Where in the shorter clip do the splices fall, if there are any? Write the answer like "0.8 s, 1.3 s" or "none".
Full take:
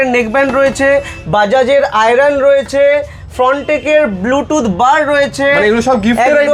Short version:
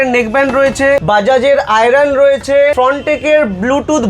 1.0 s, 2.7 s